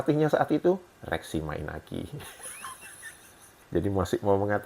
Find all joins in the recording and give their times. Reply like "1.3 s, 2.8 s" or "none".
3.5 s